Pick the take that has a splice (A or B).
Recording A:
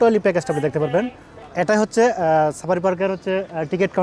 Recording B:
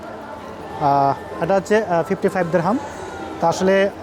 A